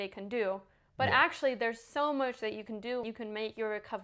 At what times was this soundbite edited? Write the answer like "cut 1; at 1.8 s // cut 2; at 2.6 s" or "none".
cut 1; at 3.0 s